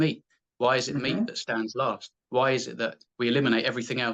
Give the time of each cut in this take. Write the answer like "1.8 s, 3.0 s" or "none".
2.1 s, 3.0 s